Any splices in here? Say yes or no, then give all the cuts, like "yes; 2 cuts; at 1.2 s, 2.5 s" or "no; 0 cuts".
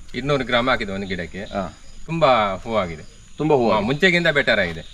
no; 0 cuts